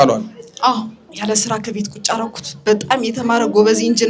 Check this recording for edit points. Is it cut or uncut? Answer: cut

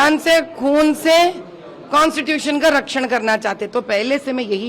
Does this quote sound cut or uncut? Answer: uncut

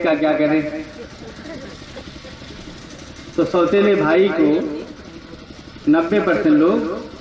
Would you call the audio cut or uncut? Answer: uncut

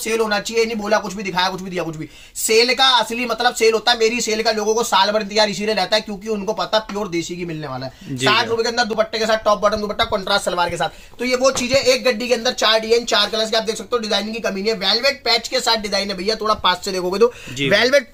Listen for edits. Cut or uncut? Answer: uncut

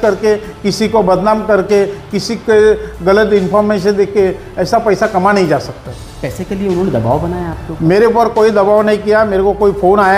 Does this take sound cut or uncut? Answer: uncut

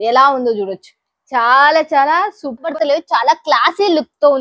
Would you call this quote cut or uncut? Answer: cut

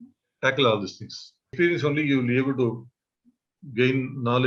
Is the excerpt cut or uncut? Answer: cut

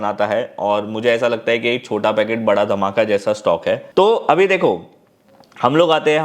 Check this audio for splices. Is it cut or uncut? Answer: uncut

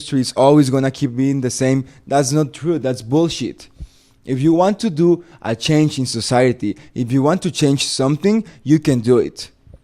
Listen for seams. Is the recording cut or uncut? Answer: uncut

